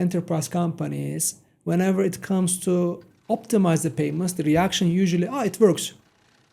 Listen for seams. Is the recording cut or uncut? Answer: uncut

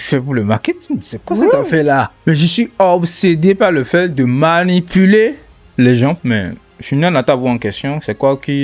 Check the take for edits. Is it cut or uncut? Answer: cut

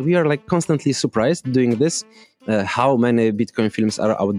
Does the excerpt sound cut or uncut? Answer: uncut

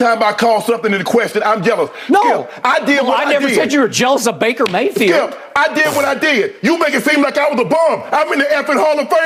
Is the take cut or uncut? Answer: uncut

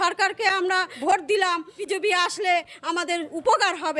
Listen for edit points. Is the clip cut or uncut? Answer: cut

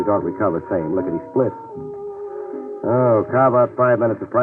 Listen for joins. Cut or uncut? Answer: cut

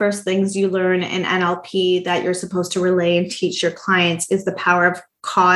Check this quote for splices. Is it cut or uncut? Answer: uncut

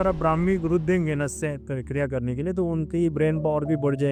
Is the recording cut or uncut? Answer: uncut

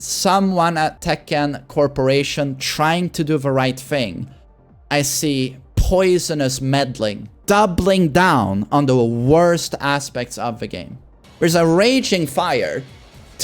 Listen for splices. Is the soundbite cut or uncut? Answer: cut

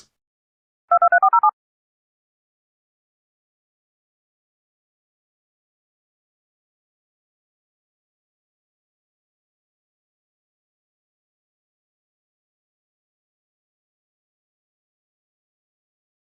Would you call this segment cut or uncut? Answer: uncut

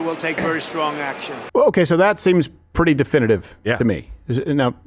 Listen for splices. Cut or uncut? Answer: cut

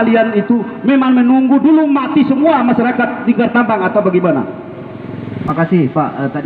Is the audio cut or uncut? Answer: cut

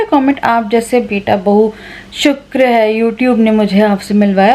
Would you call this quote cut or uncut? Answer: uncut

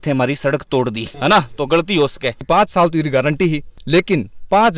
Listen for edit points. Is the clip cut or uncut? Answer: cut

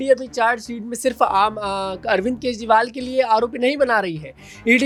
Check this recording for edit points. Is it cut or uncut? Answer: uncut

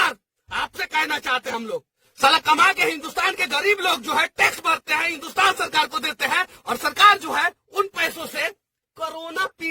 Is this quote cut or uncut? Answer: cut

